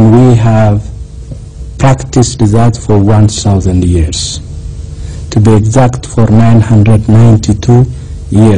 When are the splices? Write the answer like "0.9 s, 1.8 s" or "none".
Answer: 2.8 s

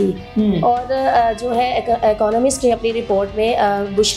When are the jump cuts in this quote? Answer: none

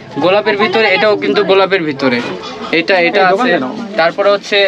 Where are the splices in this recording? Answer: none

